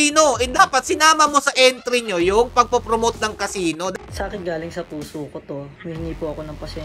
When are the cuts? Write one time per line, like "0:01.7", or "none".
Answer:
0:03.9
0:05.7